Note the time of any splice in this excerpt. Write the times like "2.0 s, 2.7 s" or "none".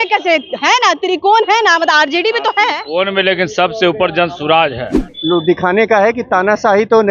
5.1 s